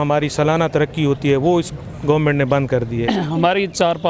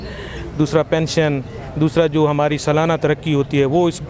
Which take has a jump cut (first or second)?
first